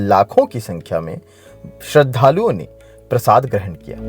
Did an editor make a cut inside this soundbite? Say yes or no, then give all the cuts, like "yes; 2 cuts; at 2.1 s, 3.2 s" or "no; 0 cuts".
no; 0 cuts